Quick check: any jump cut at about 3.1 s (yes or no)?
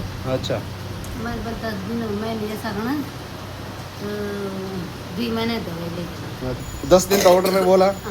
no